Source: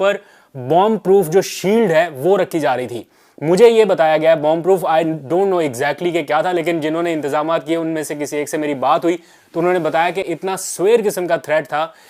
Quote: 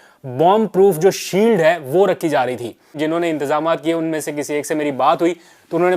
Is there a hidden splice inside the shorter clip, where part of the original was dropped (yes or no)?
yes